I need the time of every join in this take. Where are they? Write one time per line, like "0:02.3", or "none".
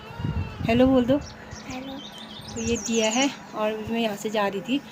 none